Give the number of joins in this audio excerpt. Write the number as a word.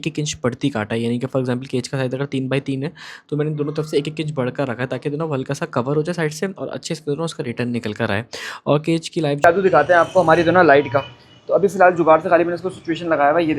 one